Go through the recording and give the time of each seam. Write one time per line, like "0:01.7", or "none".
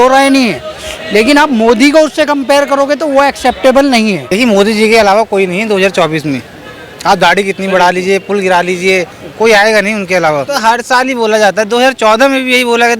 0:04.2
0:10.5